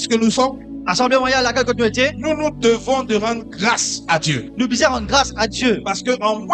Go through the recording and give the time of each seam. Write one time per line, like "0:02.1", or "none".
none